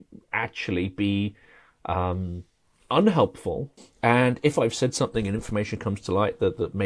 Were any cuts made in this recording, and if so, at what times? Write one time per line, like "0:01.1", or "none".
0:03.7